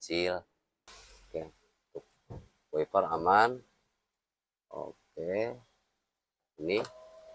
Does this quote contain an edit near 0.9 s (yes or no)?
yes